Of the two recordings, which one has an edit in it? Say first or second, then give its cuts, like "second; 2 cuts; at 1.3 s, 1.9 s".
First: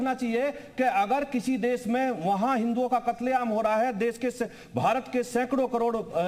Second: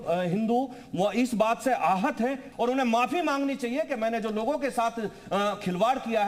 second; 1 cut; at 2.4 s